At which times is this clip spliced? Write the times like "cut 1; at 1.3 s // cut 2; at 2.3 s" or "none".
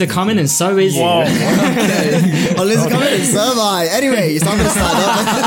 cut 1; at 0.9 s